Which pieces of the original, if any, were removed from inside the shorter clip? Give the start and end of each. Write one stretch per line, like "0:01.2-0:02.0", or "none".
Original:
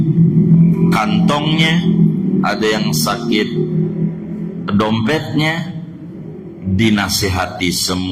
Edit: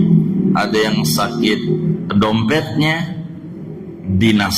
0:03.9-0:04.6